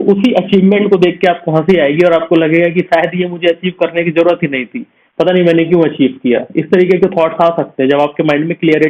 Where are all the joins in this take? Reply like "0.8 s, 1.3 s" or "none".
none